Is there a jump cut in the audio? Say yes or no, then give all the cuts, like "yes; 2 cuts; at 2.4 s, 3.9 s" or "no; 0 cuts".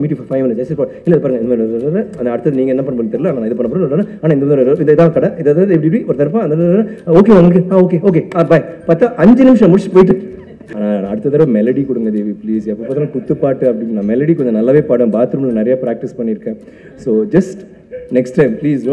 yes; 1 cut; at 10.7 s